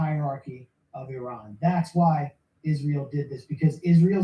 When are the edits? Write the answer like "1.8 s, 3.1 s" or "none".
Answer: 1.2 s, 2.4 s